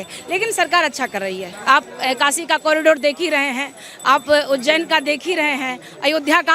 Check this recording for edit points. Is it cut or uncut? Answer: cut